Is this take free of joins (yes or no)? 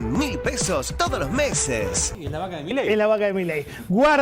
no